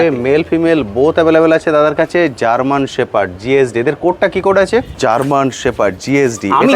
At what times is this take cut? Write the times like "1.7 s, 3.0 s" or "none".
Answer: 4.9 s